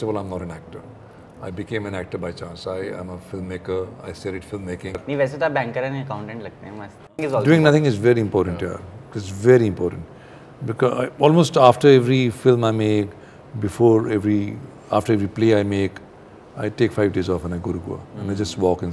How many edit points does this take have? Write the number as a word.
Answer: two